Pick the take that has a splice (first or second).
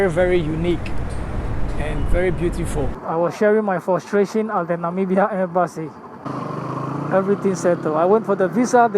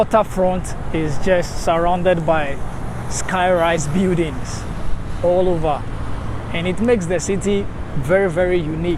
first